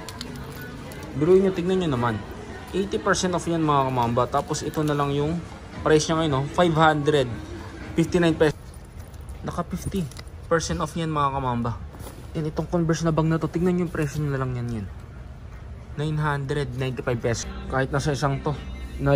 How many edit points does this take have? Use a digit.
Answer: 2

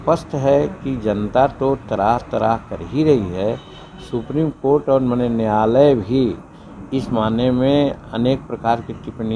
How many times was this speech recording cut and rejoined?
0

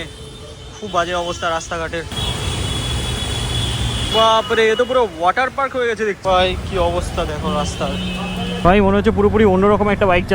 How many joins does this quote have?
4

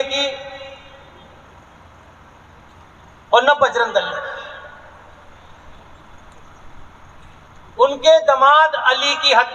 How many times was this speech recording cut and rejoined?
0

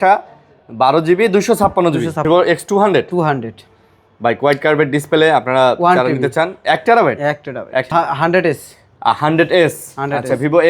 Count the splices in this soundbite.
2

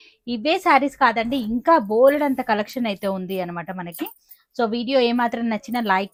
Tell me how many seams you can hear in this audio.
0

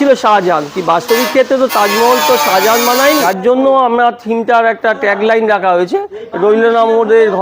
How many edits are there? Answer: 1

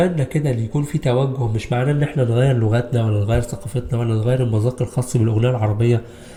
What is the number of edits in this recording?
0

